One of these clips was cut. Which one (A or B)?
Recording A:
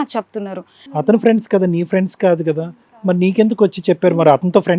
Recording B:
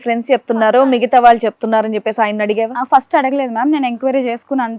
A